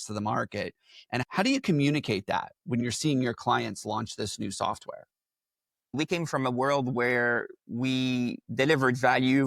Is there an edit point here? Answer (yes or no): yes